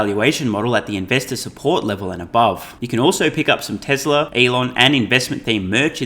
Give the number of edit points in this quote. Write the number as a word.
two